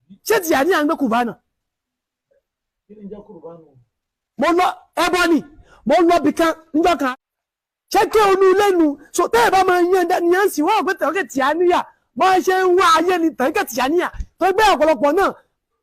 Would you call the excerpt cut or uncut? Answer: cut